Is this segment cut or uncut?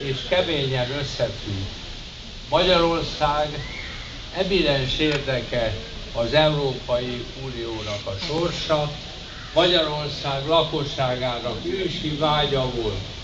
cut